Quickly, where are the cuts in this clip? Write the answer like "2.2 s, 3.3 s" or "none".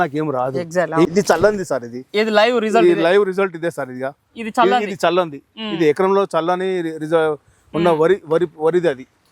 1.1 s